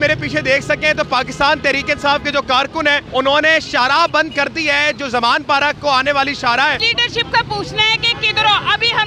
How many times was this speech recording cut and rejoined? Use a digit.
2